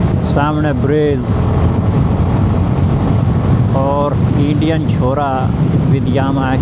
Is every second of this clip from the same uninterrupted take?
yes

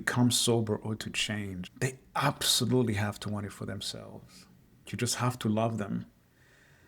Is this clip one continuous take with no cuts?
no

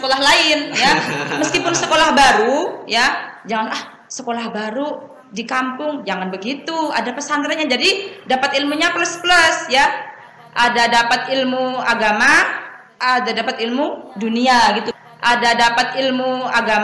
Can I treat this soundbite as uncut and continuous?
no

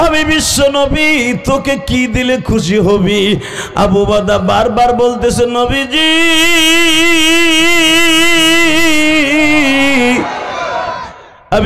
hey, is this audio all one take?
yes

